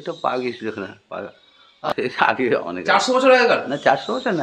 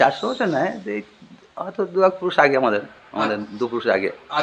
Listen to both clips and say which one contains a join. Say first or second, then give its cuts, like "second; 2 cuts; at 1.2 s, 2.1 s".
first; 1 cut; at 1.9 s